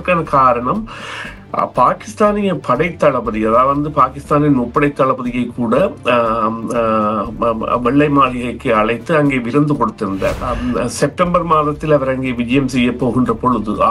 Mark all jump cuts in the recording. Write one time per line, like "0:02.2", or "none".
0:10.5